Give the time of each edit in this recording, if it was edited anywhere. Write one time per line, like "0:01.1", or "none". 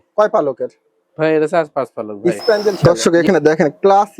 0:02.8